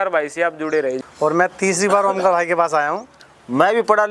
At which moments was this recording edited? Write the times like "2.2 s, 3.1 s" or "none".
1.0 s, 3.2 s

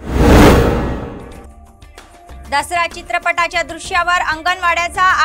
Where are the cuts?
none

